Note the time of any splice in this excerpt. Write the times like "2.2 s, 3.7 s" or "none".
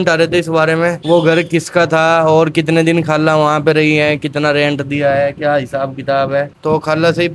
1.0 s, 6.5 s